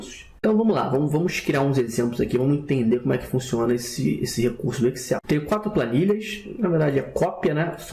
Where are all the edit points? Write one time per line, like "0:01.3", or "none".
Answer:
0:03.9

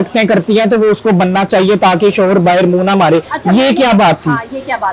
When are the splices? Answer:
none

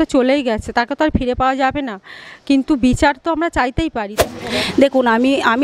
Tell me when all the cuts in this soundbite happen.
0:04.1

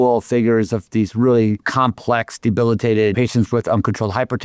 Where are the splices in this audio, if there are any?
0:01.6
0:03.1

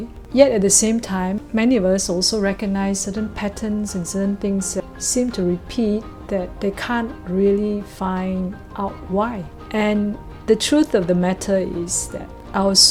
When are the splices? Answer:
none

